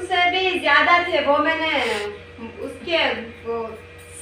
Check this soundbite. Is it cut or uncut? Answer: uncut